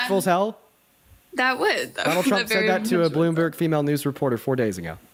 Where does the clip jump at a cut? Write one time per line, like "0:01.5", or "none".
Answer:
none